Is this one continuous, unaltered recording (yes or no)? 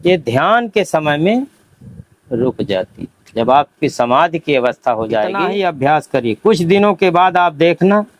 no